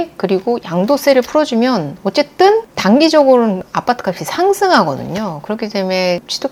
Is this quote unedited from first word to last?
yes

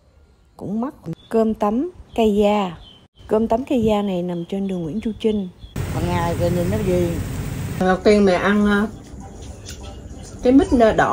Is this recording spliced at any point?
yes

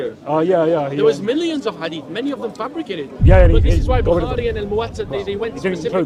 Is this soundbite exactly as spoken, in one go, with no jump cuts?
yes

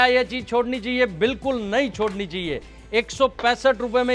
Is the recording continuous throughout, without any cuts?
yes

